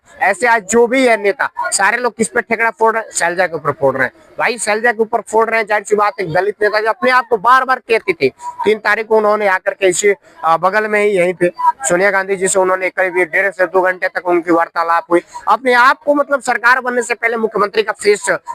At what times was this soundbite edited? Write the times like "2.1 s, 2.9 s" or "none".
none